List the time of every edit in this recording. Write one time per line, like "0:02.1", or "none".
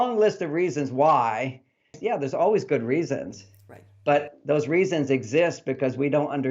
0:02.0